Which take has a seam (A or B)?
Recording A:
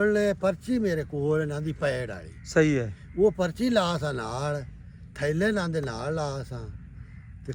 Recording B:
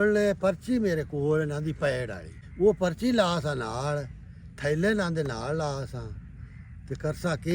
B